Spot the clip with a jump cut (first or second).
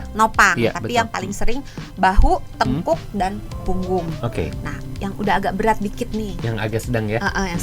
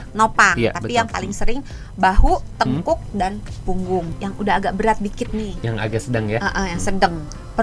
second